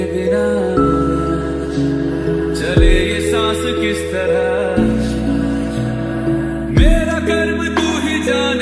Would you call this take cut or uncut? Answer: uncut